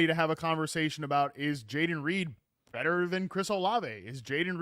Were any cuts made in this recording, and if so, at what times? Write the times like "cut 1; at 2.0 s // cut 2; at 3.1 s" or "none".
none